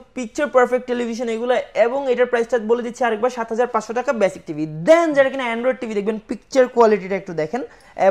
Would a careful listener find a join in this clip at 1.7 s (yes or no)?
no